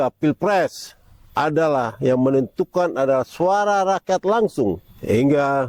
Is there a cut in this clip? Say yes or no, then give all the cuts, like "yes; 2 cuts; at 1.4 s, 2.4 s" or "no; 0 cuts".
no; 0 cuts